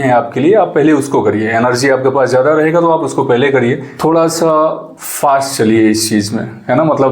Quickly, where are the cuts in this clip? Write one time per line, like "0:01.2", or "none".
0:03.9